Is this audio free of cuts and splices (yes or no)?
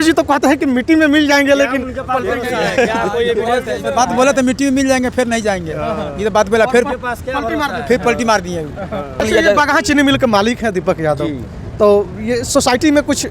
no